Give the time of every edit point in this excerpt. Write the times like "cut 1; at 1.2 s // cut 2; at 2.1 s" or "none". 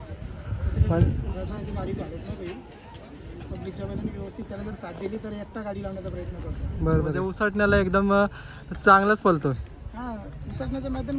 cut 1; at 7.3 s